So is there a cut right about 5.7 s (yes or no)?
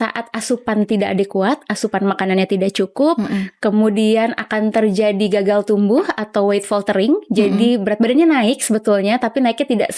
no